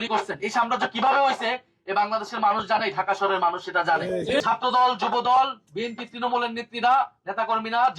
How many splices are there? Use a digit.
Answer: 1